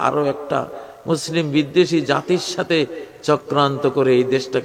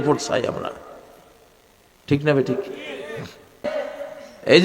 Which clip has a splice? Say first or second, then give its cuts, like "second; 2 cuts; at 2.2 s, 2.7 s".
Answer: second; 1 cut; at 3.7 s